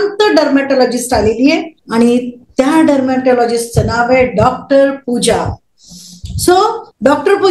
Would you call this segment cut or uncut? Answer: uncut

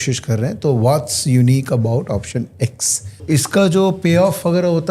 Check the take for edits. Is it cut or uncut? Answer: cut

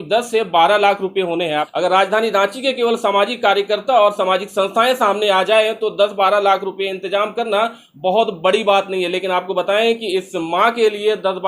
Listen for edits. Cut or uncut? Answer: cut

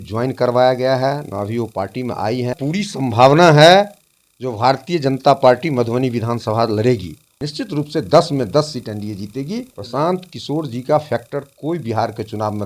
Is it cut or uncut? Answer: cut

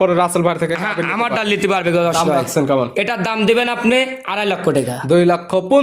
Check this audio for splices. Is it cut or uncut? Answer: uncut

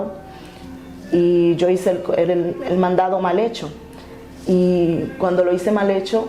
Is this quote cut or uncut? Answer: uncut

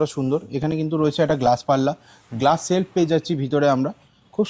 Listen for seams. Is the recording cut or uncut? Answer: uncut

